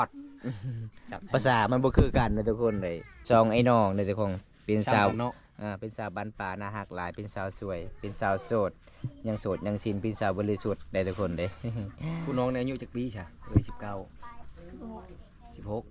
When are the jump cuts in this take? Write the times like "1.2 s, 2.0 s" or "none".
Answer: 3.1 s